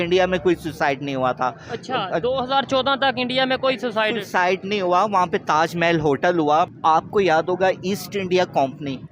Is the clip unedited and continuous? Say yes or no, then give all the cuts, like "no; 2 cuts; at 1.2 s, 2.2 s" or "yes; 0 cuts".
no; 1 cut; at 6.7 s